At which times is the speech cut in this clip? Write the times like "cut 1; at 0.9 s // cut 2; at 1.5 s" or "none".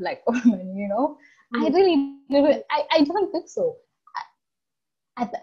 none